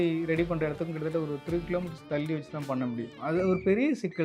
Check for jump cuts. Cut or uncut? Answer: cut